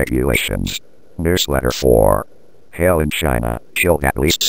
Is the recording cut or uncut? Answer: cut